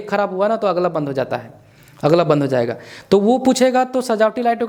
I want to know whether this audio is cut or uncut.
uncut